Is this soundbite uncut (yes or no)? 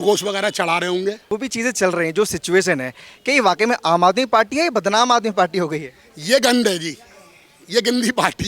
no